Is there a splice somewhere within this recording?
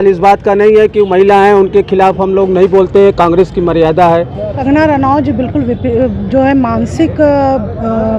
yes; 1 cut; at 4.5 s

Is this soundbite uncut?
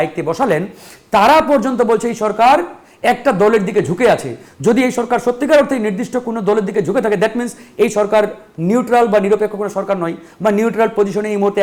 yes; 0 cuts

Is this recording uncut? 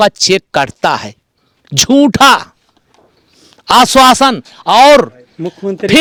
yes; 0 cuts

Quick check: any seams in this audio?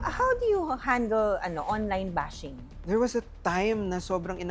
no; 0 cuts

